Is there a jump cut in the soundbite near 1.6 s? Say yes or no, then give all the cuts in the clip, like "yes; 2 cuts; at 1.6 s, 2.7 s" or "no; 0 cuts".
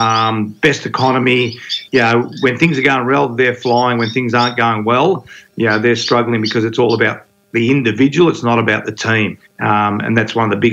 no; 1 cut; at 9.5 s